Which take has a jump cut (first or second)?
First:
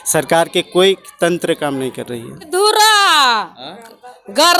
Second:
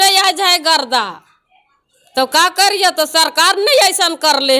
first